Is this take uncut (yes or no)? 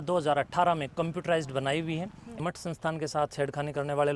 no